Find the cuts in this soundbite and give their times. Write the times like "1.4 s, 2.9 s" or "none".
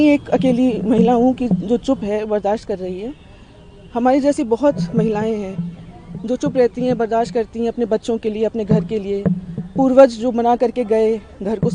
none

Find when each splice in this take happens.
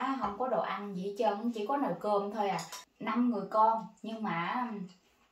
2.8 s

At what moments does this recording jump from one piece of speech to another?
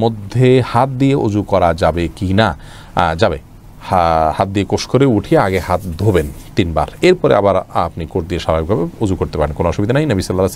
none

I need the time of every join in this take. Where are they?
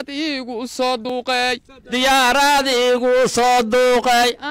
1.1 s

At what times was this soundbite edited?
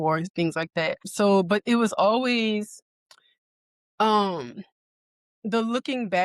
1.1 s

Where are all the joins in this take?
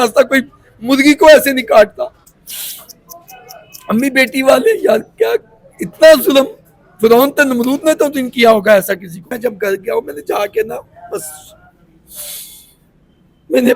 9.3 s

